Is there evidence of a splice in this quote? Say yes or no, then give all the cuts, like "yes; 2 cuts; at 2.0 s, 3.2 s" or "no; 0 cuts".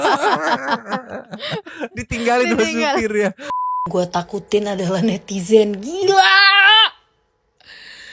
yes; 1 cut; at 3.7 s